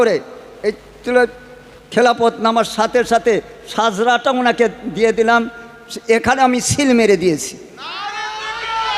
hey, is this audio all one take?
yes; 0 cuts

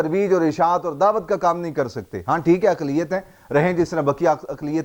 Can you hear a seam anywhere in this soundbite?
no; 0 cuts

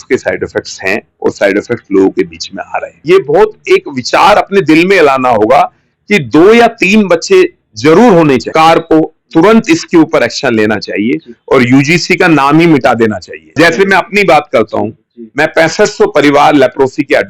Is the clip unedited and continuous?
no; 3 cuts; at 3.0 s, 8.5 s, 13.5 s

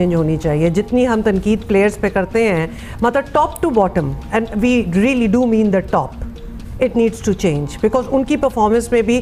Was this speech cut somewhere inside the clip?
no; 0 cuts

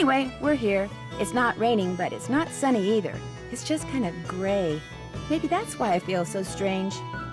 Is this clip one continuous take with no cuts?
yes; 0 cuts

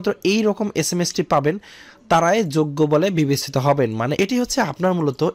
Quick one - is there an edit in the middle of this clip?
yes; 1 cut; at 4.1 s

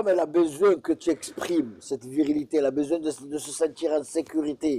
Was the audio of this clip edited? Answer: no; 0 cuts

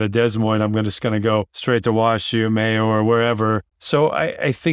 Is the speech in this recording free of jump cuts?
no; 2 cuts; at 1.5 s, 3.7 s

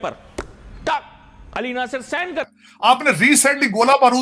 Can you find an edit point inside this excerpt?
yes; 1 cut; at 2.5 s

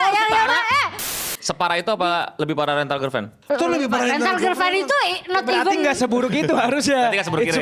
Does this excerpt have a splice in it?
yes; 2 cuts; at 1.0 s, 3.3 s

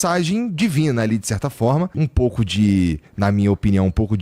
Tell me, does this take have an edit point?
yes; 1 cut; at 1.9 s

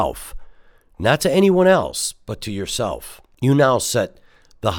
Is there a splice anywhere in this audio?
yes; 1 cut; at 3.2 s

